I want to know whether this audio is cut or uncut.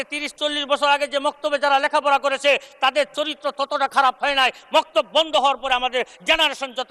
uncut